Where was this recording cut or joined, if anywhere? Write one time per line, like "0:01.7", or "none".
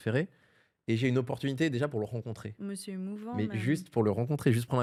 none